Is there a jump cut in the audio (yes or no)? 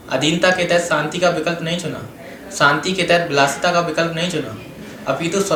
no